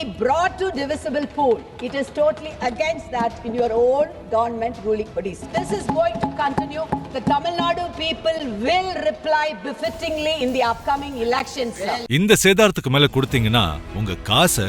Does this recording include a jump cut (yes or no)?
yes